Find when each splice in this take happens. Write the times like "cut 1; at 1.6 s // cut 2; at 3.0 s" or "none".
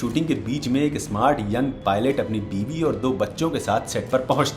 none